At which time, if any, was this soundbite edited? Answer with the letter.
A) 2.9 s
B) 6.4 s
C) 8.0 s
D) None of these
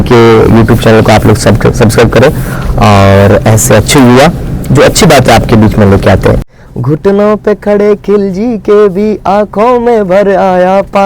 B